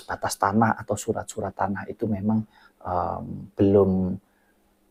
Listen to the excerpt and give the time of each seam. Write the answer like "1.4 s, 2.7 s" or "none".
none